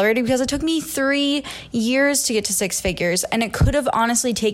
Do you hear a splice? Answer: no; 0 cuts

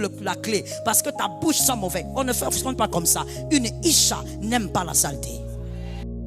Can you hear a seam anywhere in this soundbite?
yes; 1 cut; at 5.1 s

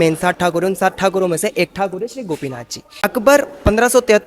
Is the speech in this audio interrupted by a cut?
yes; 1 cut; at 3.0 s

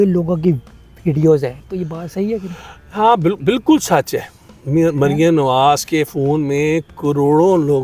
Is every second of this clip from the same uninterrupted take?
yes; 0 cuts

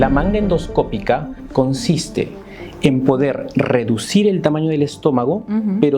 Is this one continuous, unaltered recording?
no; 1 cut; at 1.4 s

